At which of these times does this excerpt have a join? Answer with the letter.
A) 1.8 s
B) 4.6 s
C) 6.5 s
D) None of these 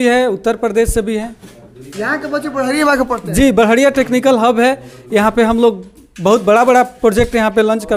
D